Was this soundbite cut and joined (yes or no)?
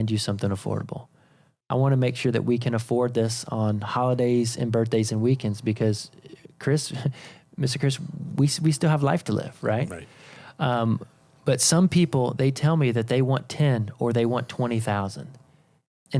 no